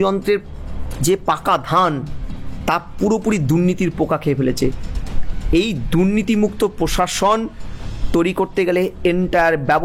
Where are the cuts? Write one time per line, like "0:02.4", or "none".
none